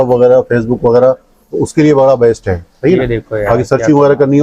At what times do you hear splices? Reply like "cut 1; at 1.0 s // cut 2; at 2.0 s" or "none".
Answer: none